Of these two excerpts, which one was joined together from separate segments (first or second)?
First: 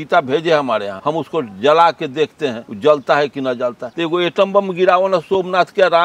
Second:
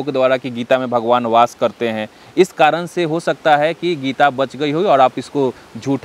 first